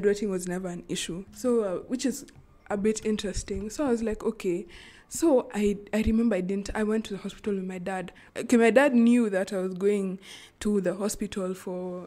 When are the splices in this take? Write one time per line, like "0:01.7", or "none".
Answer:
none